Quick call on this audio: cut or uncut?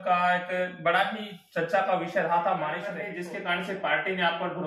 cut